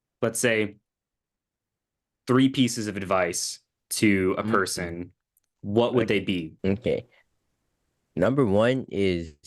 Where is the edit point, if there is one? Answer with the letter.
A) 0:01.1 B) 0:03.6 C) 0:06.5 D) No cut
C